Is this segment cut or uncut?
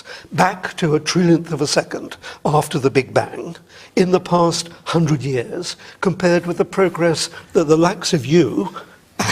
cut